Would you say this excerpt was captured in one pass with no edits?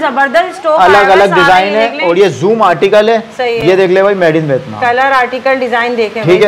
yes; 0 cuts

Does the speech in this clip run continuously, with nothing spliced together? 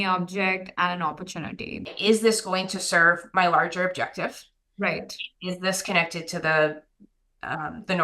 no; 1 cut; at 1.9 s

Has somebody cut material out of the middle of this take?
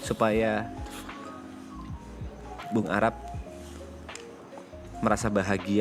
no; 0 cuts

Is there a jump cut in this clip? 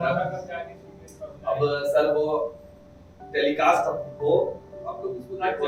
no; 0 cuts

